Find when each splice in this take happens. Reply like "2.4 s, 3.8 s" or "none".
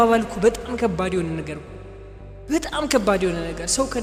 none